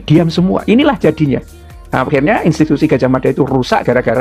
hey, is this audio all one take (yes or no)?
yes